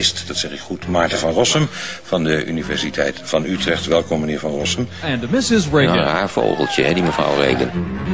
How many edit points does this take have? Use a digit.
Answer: 0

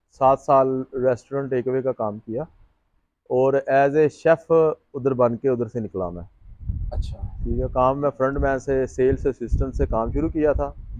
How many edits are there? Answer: 0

